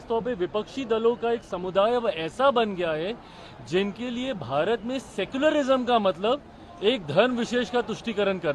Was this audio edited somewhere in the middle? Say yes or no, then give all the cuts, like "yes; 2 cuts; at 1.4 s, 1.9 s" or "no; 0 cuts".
no; 0 cuts